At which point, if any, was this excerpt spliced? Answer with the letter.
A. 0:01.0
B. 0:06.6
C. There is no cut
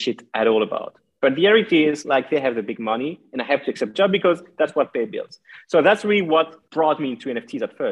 B